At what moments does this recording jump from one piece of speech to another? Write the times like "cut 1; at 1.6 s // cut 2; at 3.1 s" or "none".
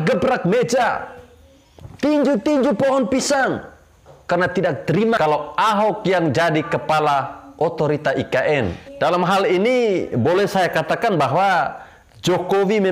cut 1; at 5.2 s // cut 2; at 8.9 s